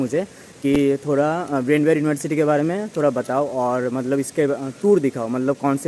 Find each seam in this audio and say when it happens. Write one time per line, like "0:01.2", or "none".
none